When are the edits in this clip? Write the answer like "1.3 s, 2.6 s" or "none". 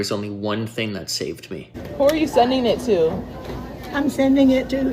1.8 s